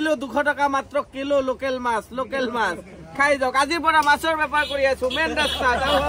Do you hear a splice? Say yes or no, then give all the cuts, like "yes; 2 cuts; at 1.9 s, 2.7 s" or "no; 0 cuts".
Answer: no; 0 cuts